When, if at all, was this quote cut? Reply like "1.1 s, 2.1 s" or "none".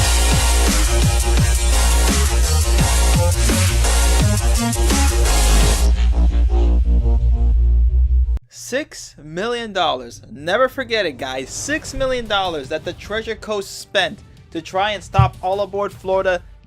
6.1 s